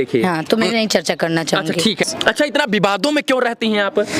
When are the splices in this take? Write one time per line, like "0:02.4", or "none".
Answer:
0:02.1